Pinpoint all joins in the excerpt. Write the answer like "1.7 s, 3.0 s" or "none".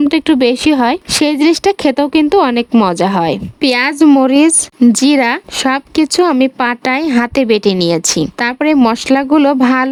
none

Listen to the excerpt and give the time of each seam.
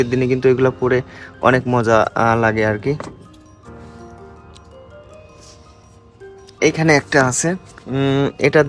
none

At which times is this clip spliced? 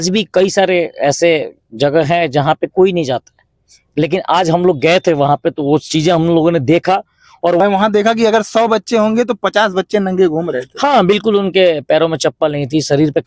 7.6 s

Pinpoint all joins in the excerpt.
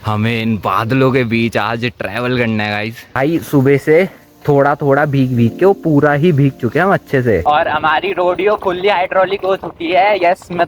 3.1 s, 7.4 s

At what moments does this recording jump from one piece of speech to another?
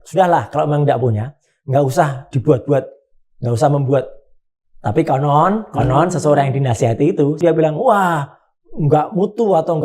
7.4 s

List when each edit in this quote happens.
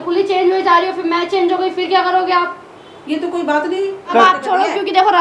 4.1 s

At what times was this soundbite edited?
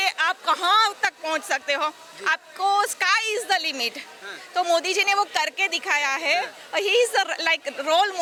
none

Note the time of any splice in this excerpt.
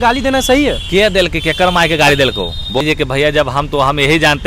2.8 s

